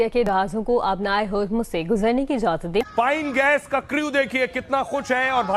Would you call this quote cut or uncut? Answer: cut